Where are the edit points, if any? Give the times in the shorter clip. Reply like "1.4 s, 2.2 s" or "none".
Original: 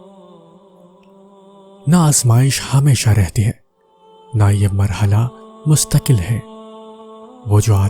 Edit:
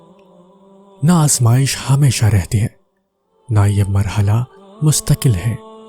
1.0 s